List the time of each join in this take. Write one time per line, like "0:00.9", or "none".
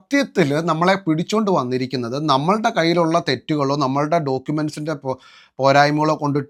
none

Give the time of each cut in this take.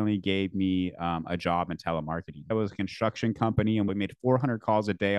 0:02.5
0:03.9

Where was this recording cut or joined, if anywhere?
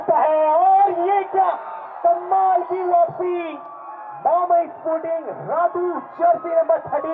0:02.2

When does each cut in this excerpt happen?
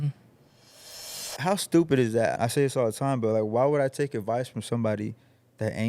0:02.3

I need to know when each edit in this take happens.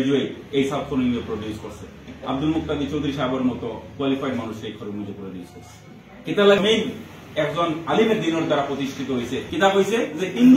0:06.6
0:09.5

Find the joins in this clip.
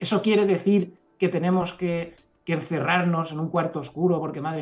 none

